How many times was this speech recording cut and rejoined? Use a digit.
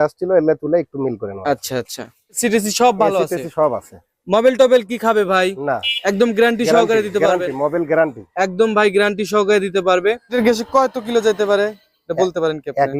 2